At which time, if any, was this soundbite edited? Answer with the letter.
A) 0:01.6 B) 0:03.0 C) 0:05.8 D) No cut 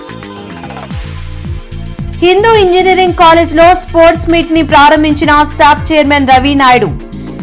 A